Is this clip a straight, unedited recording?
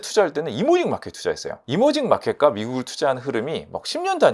no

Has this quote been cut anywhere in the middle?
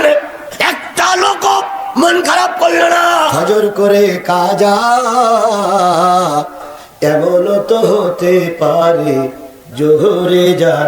yes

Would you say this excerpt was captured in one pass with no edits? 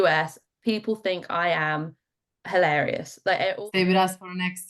no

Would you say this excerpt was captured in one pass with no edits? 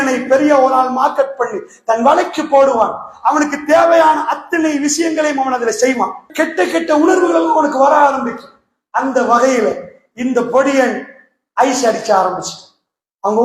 no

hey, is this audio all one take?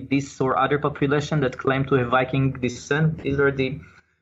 yes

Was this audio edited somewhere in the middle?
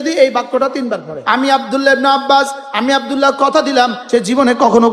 yes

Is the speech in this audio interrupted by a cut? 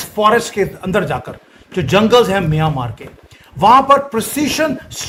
no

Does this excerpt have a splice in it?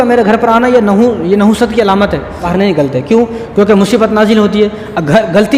yes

